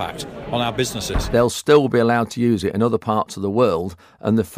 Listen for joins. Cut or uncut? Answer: cut